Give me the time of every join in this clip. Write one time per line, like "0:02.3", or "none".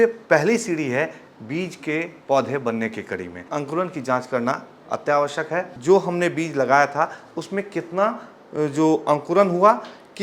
0:03.4
0:05.7